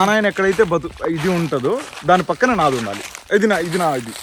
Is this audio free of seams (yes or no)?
yes